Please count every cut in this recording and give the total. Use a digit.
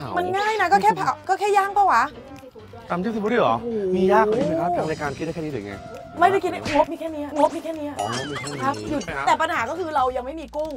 1